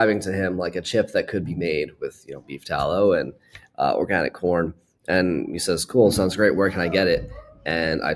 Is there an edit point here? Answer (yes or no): no